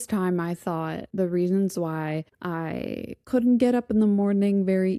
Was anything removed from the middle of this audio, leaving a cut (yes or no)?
yes